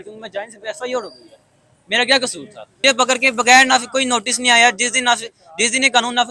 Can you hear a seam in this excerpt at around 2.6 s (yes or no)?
yes